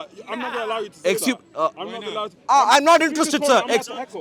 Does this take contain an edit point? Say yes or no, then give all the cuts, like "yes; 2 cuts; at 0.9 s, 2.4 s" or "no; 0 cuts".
no; 0 cuts